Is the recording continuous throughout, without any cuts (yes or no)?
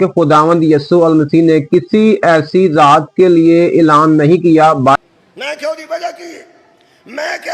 no